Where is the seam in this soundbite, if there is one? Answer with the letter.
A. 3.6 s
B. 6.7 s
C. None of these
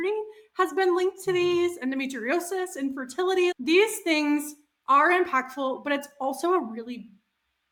C